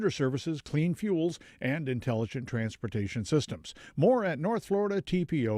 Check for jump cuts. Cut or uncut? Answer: uncut